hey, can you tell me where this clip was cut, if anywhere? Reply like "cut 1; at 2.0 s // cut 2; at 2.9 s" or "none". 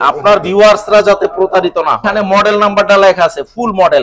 cut 1; at 2.1 s